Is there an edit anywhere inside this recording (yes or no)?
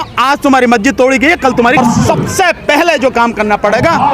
yes